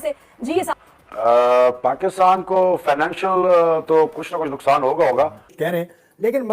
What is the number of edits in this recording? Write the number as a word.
one